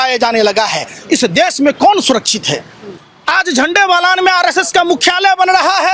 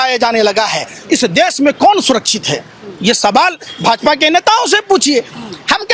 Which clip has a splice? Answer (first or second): first